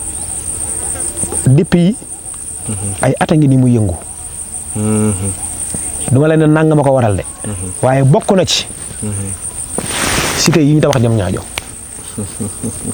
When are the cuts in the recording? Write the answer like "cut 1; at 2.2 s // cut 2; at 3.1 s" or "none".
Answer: none